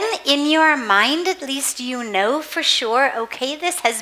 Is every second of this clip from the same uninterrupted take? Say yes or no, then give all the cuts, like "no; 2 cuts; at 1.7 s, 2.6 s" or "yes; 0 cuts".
yes; 0 cuts